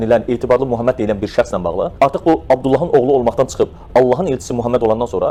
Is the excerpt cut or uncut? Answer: uncut